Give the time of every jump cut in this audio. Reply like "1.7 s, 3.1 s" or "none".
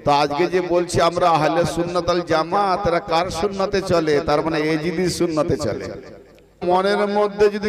6.6 s